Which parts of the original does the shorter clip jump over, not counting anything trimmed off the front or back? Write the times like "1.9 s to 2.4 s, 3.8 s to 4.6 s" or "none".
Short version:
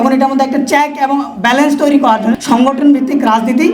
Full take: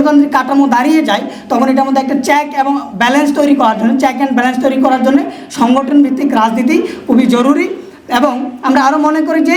3.9 s to 5.5 s